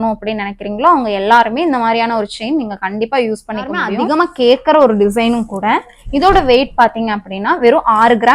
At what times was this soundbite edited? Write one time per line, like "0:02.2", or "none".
0:03.9